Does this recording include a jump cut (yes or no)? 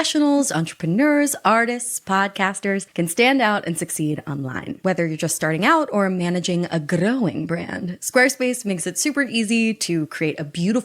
no